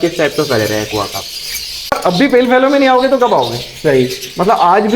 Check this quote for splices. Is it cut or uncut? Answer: cut